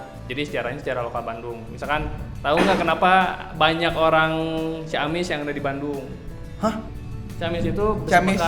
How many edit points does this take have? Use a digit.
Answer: 1